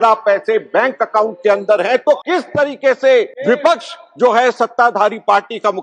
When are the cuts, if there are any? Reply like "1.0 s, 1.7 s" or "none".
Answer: 2.2 s, 3.3 s